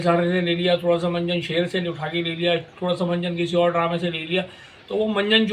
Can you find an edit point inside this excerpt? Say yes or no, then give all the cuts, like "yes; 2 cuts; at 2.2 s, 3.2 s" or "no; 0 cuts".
no; 0 cuts